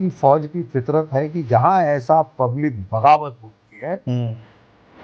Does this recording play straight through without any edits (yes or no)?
yes